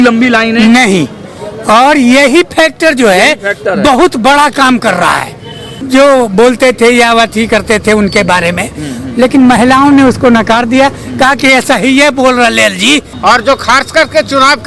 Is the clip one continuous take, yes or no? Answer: no